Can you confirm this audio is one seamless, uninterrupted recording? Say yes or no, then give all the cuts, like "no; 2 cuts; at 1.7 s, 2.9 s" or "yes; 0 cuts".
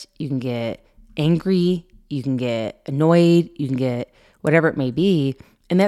yes; 0 cuts